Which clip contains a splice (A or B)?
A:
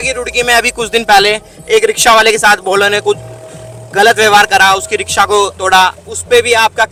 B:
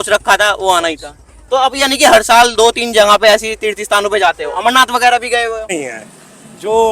B